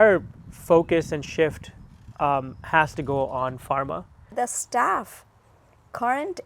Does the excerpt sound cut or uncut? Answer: cut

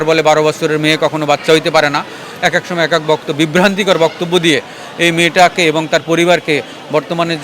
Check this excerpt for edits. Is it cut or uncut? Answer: uncut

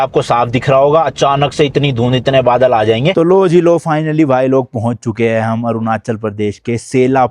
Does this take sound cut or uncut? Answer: cut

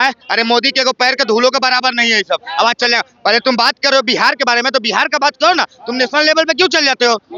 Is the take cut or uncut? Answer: uncut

